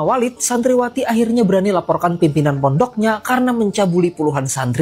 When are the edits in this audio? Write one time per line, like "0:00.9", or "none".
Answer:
none

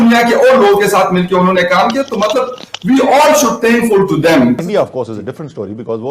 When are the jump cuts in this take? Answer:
0:04.6

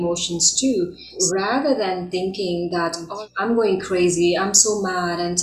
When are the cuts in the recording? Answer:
0:01.2
0:03.1

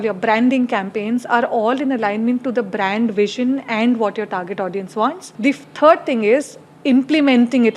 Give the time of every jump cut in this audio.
0:05.3

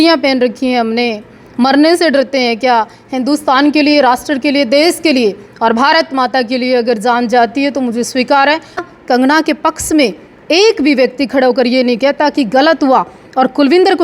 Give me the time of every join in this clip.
0:08.8

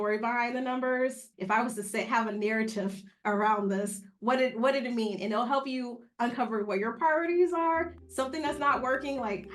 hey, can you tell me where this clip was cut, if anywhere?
0:01.2

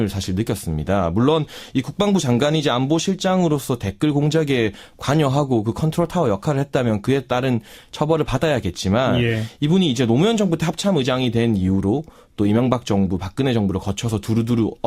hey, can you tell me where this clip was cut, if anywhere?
0:03.9

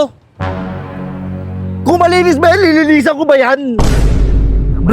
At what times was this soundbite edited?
none

